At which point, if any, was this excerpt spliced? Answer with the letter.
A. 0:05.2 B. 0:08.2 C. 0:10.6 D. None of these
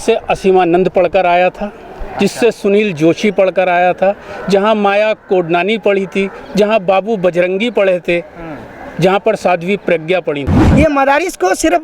C